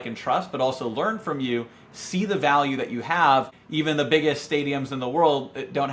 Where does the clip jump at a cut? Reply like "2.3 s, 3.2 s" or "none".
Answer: 3.5 s